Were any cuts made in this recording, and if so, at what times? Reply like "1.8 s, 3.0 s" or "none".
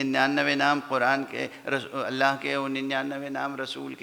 none

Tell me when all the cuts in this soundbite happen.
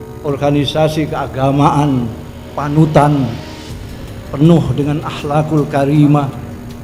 none

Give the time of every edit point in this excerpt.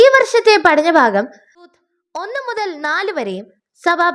1.7 s

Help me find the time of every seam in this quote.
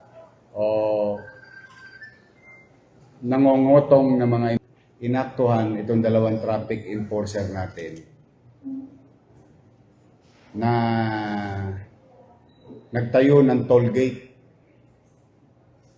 4.6 s

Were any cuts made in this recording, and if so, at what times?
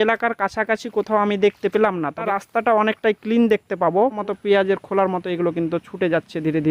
2.3 s, 4.2 s

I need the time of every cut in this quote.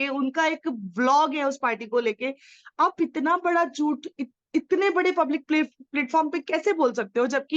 none

